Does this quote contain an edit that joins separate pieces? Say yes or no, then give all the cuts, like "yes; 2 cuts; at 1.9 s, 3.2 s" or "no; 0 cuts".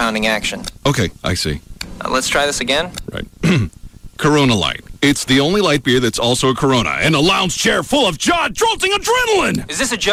no; 0 cuts